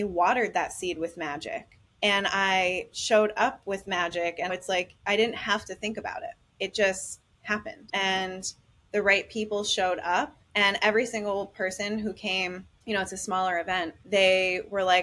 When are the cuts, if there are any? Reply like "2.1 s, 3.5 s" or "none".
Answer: 1.8 s, 4.5 s, 6.4 s, 7.8 s, 10.4 s, 12.7 s, 14.0 s